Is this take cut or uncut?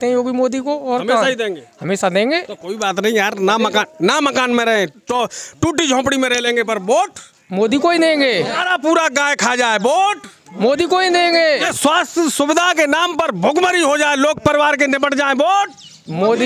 cut